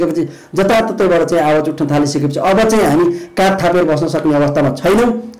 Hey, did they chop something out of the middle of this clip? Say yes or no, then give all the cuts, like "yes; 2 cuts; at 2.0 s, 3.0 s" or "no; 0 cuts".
no; 0 cuts